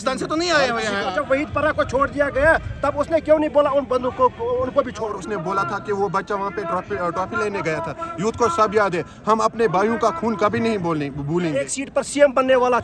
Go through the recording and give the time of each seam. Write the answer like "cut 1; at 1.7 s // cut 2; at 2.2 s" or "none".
cut 1; at 1.2 s // cut 2; at 5.1 s // cut 3; at 11.6 s